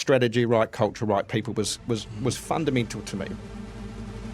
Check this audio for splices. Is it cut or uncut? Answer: cut